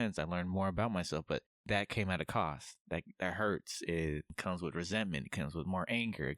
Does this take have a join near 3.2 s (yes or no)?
no